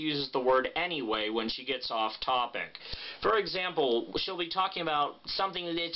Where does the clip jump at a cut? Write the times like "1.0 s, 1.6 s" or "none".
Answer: 4.5 s